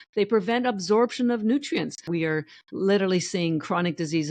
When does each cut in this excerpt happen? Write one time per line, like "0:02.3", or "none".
0:02.1